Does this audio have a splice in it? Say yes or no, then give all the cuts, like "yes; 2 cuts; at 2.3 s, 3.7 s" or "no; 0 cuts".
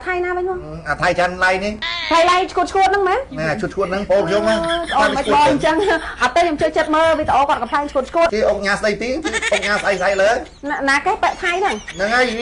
yes; 3 cuts; at 1.9 s, 8.3 s, 10.5 s